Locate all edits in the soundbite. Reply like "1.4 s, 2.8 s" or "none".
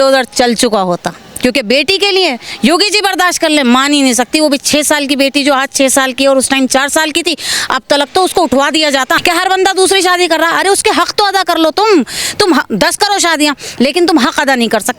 9.2 s